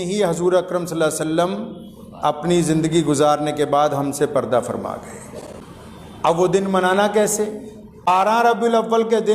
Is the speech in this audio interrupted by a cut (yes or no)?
yes